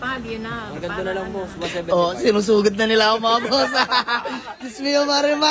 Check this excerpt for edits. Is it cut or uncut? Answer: uncut